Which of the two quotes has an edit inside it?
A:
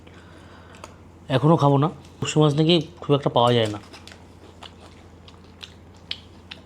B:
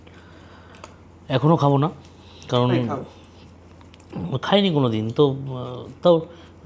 A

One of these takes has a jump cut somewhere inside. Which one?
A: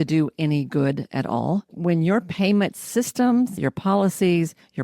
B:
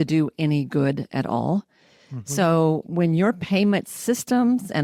A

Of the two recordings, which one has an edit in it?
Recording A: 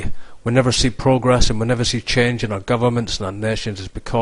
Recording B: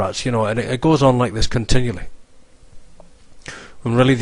A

